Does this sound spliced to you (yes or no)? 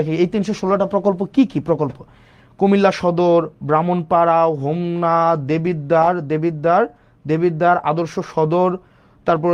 no